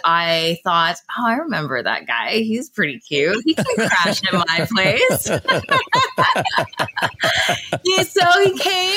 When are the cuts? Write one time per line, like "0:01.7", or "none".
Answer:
none